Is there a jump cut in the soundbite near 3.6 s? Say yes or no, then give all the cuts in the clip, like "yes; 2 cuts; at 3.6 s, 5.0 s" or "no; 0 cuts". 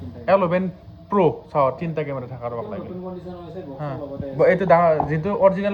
no; 0 cuts